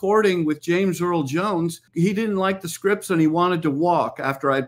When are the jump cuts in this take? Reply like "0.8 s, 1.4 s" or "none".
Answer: 1.9 s